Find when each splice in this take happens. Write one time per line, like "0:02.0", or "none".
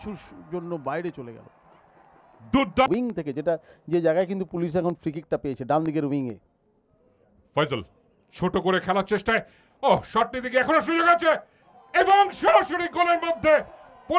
0:02.9